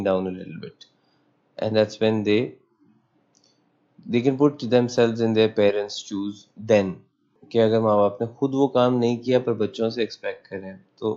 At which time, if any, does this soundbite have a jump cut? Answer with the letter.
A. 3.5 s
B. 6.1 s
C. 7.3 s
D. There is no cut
C